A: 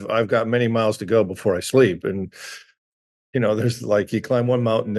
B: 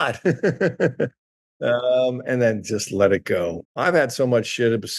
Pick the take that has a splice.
B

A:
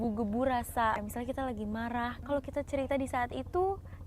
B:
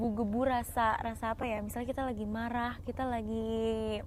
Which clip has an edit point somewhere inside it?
A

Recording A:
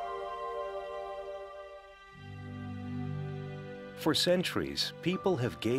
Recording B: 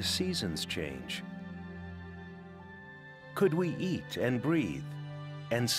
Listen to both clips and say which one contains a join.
B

